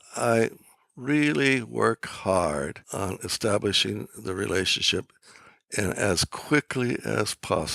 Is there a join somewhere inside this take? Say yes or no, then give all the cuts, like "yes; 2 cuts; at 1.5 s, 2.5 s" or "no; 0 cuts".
yes; 1 cut; at 2.8 s